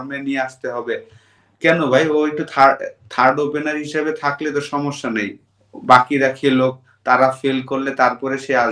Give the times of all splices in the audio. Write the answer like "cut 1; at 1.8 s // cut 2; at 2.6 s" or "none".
none

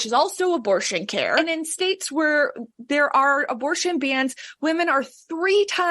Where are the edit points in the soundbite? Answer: cut 1; at 1.4 s

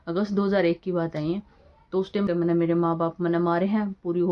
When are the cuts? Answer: cut 1; at 2.3 s

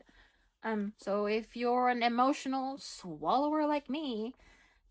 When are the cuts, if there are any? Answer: cut 1; at 1.0 s

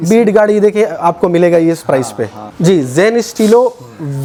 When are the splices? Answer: none

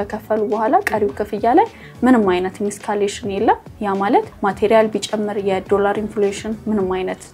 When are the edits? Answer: none

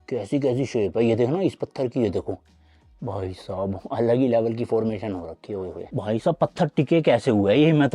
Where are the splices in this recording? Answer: cut 1; at 5.8 s

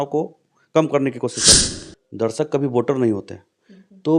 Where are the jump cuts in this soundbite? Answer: cut 1; at 1.6 s

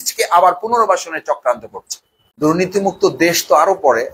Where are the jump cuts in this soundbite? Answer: cut 1; at 2.2 s

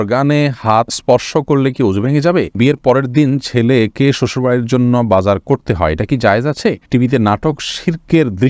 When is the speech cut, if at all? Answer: cut 1; at 0.9 s // cut 2; at 2.6 s // cut 3; at 6.9 s

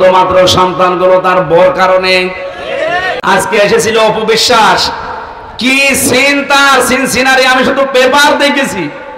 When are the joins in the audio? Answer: cut 1; at 3.2 s

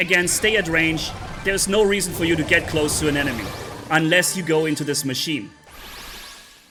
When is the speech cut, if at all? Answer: none

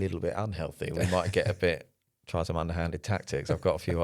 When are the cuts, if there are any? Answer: none

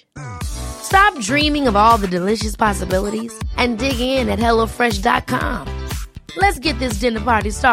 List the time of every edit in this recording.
none

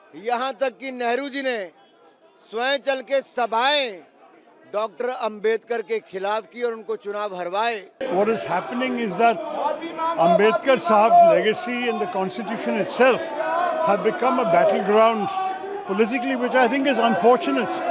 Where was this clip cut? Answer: cut 1; at 7.9 s

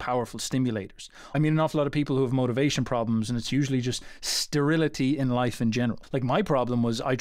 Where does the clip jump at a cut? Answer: cut 1; at 1.2 s // cut 2; at 6.0 s

